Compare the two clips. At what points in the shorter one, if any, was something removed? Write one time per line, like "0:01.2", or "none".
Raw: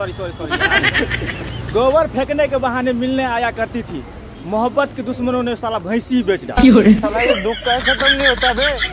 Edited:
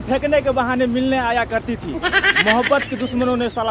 none